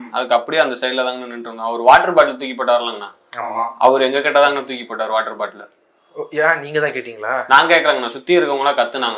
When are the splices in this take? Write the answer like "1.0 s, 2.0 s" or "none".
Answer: none